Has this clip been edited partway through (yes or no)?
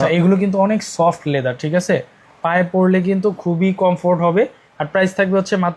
no